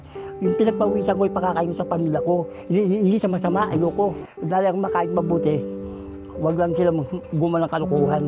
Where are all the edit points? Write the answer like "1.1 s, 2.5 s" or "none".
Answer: 4.3 s